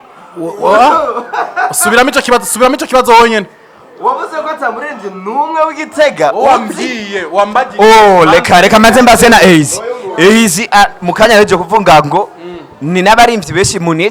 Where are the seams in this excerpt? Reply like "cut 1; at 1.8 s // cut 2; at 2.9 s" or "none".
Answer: none